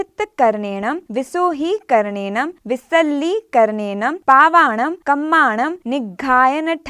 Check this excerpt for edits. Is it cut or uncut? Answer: cut